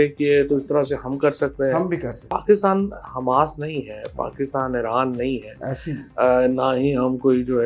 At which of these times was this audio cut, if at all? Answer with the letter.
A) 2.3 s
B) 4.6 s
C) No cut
A